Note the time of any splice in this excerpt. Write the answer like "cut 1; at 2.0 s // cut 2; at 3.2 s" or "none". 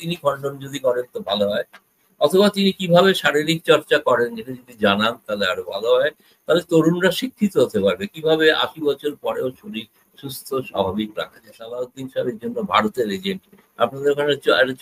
cut 1; at 11.7 s